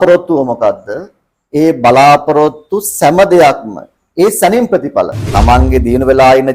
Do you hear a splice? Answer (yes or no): yes